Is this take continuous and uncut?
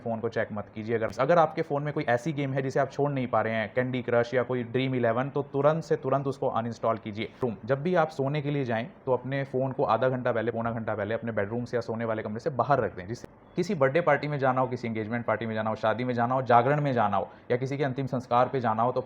no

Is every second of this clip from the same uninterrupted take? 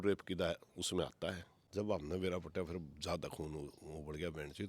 no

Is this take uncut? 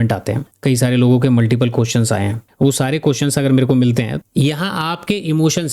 no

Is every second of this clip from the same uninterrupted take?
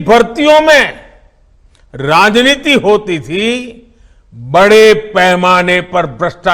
yes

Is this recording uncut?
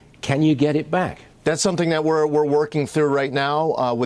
no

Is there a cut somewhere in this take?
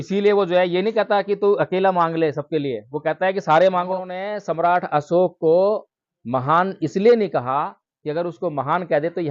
yes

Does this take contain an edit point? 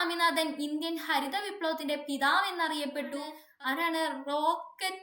yes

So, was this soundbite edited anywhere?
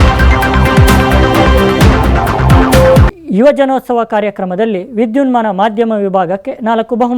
no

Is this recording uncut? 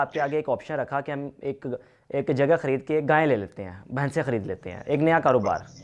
yes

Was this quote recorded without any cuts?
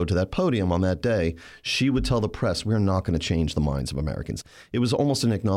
no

